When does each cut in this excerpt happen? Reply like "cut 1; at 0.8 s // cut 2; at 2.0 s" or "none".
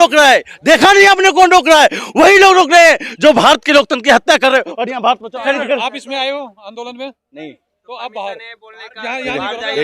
cut 1; at 5.4 s